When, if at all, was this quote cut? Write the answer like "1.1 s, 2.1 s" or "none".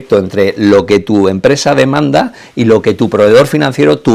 none